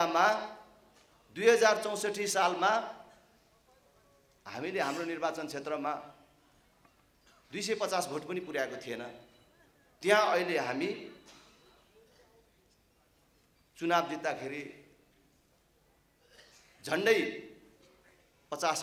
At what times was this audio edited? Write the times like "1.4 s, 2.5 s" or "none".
none